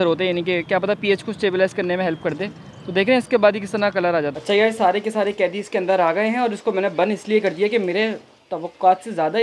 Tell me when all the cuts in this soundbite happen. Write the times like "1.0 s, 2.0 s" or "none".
4.3 s